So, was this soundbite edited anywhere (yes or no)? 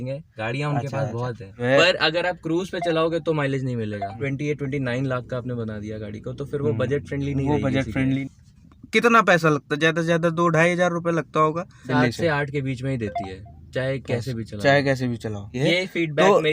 yes